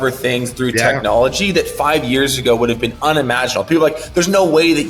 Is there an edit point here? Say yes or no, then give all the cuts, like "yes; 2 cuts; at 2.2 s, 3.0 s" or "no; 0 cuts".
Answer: no; 0 cuts